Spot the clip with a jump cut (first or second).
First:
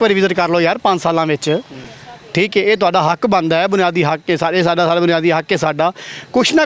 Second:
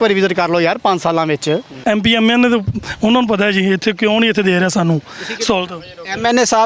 second